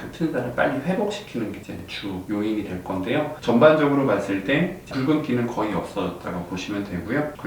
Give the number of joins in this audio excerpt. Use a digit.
1